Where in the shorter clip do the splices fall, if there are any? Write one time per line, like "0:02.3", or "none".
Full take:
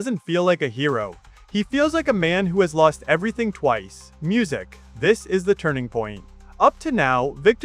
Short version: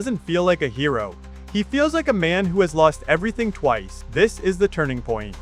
0:04.0